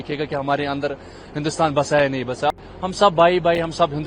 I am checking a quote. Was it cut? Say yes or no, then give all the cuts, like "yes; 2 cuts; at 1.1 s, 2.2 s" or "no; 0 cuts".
yes; 1 cut; at 2.5 s